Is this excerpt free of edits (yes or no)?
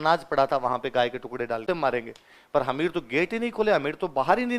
no